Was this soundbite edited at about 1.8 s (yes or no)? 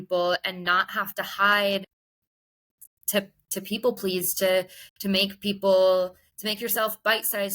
yes